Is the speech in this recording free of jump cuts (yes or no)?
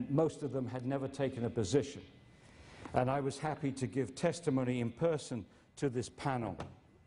yes